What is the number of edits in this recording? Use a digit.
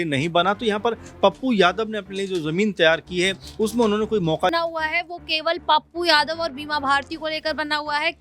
1